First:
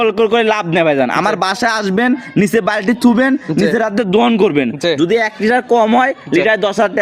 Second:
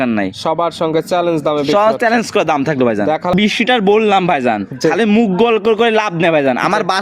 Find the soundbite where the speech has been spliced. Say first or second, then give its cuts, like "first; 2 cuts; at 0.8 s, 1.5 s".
second; 1 cut; at 3.3 s